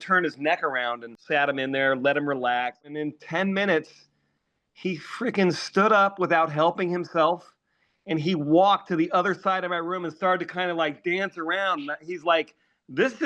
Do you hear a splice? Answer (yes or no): yes